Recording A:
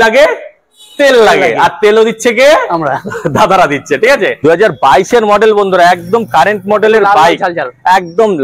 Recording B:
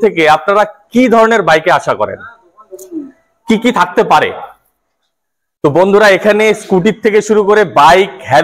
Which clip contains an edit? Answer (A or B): A